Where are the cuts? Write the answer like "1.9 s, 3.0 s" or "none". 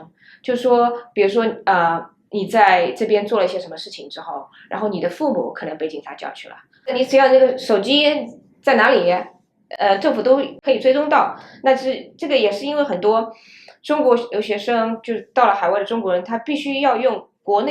6.7 s, 10.6 s